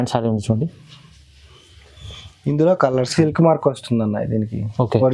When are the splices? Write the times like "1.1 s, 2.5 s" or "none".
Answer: 3.1 s